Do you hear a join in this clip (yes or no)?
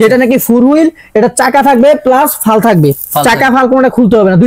no